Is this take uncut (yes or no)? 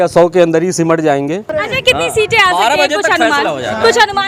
no